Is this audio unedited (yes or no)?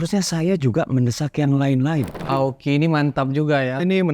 no